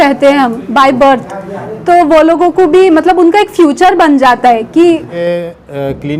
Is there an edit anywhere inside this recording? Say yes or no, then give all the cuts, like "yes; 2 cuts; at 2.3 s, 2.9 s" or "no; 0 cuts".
yes; 1 cut; at 5.2 s